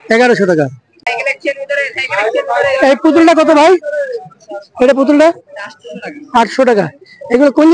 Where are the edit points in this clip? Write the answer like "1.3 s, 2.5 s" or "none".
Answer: 1.0 s